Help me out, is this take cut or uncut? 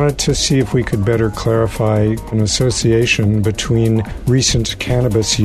cut